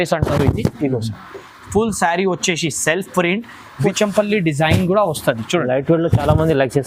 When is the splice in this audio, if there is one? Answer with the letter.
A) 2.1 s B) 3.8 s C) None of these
B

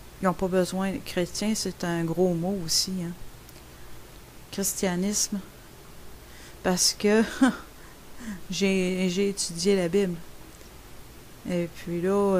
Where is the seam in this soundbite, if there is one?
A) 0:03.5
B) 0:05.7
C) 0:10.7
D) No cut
D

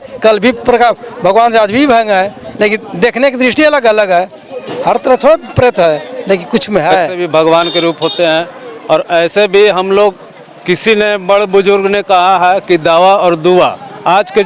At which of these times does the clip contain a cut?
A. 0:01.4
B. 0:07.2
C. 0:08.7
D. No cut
B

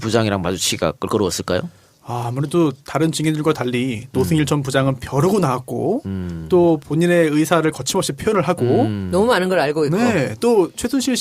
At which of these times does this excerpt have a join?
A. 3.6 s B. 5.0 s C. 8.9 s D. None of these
B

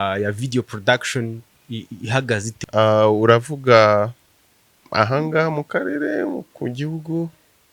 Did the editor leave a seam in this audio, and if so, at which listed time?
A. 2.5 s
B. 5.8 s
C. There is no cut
A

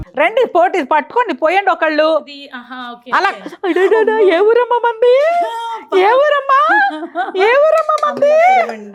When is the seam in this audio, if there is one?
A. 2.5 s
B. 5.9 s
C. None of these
C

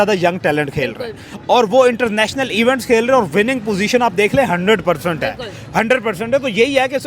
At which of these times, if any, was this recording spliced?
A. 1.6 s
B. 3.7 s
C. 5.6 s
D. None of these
D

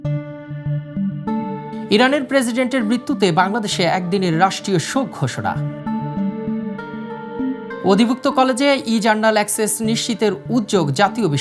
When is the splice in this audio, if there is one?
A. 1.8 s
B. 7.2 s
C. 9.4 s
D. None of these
A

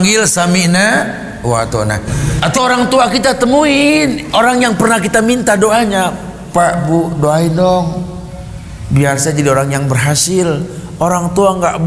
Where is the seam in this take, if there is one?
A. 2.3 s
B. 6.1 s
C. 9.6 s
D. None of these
A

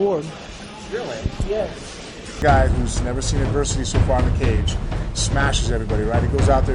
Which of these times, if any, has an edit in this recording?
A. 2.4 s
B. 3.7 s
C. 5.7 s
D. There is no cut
A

